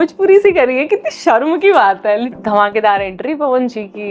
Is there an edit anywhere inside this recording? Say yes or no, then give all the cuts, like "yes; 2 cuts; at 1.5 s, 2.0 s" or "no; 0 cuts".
yes; 1 cut; at 2.3 s